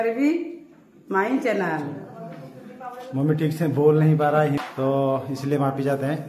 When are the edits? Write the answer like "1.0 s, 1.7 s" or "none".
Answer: 4.6 s